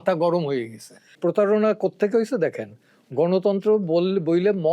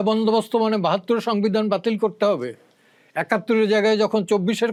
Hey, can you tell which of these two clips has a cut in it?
first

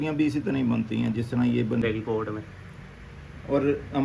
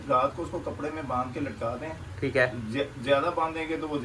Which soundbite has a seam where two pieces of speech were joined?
first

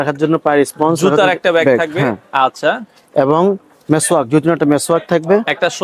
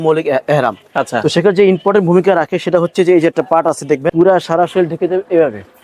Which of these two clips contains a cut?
second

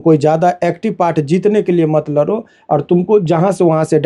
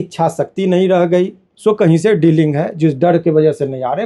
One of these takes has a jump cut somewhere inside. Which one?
second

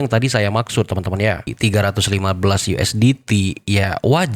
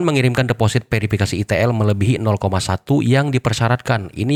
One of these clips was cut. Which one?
first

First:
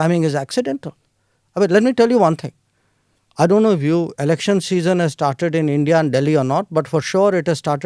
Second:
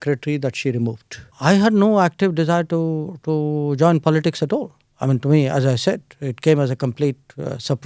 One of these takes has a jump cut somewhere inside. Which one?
second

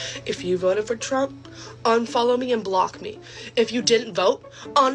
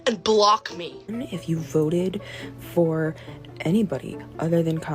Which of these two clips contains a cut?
second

